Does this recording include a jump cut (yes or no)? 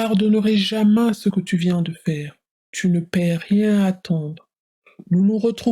no